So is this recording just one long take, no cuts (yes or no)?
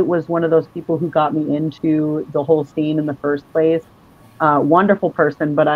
yes